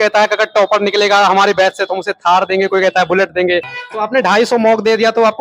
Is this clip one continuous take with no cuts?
no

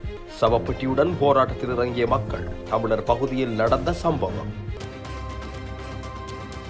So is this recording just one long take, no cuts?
no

